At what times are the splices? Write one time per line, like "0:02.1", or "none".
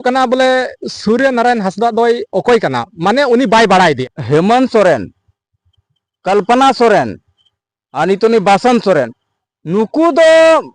0:04.1